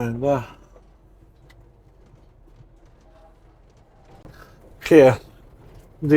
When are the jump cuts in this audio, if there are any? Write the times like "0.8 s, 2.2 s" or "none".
4.2 s